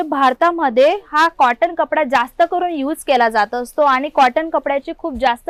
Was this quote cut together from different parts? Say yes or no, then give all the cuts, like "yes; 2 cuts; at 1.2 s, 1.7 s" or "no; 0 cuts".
no; 0 cuts